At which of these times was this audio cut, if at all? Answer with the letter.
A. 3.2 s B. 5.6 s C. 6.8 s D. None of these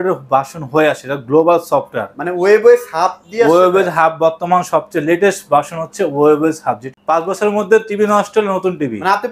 C